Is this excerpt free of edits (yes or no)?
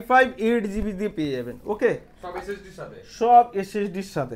yes